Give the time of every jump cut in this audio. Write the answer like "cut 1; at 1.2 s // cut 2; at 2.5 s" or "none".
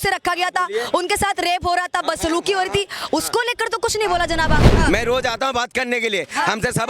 cut 1; at 4.7 s